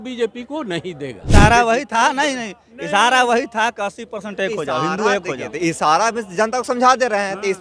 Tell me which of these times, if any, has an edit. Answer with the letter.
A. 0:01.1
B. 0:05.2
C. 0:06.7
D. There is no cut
A